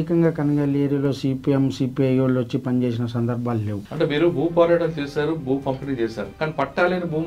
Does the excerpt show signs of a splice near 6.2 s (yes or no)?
yes